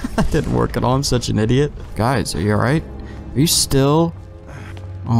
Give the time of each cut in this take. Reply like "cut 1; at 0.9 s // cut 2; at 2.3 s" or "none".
cut 1; at 1.8 s